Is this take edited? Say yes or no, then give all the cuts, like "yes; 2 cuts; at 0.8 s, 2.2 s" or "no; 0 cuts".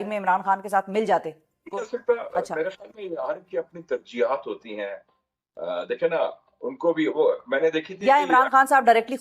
yes; 1 cut; at 1.7 s